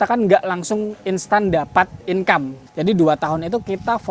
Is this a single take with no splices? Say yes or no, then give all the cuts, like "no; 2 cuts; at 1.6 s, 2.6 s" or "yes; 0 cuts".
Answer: no; 1 cut; at 2.6 s